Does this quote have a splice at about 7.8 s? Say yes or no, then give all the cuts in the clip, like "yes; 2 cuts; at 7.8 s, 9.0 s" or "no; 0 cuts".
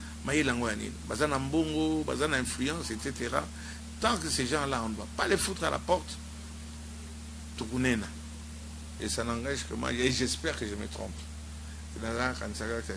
no; 1 cut; at 9.1 s